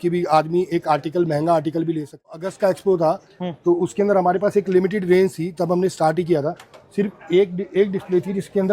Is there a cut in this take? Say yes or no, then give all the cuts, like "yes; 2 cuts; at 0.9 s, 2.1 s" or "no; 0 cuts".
yes; 1 cut; at 2.3 s